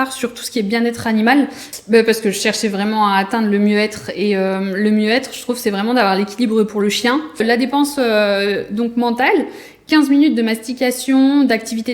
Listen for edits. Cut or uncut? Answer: cut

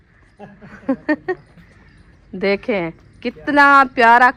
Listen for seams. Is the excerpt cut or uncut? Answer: uncut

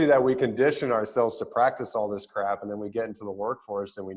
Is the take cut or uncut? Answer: uncut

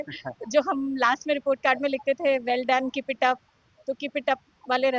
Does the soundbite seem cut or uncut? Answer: uncut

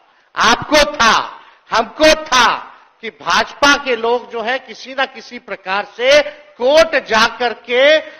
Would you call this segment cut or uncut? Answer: uncut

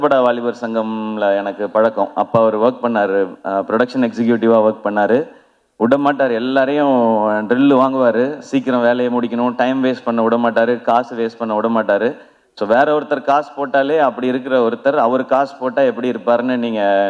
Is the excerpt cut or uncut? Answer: uncut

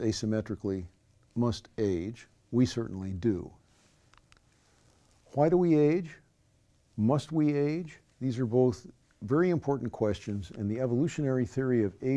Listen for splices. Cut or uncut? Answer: uncut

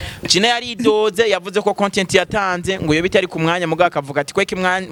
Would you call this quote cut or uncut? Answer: uncut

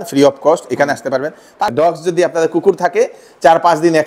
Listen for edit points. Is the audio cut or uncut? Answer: cut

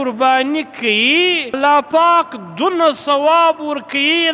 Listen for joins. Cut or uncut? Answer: cut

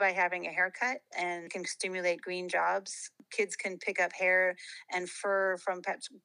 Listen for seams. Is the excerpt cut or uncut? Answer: cut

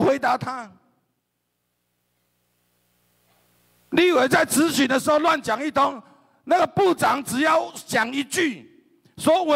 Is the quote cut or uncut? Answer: uncut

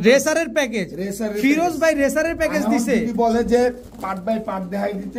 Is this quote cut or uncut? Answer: uncut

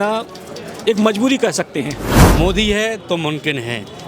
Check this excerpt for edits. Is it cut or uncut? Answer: cut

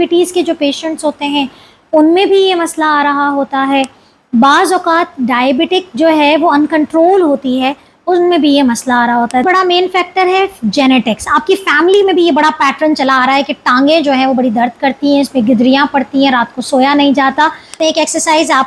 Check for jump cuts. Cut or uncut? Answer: cut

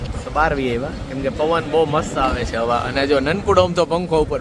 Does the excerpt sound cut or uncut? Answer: uncut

